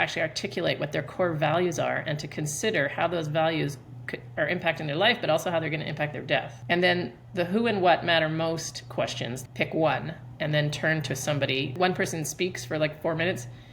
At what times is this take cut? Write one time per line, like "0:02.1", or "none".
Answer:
0:06.5
0:09.3
0:11.7